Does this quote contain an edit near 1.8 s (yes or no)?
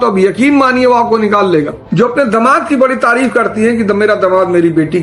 yes